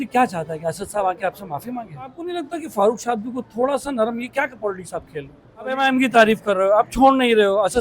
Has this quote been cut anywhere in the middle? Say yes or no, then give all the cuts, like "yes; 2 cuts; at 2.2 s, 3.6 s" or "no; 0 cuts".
yes; 2 cuts; at 2.3 s, 5.8 s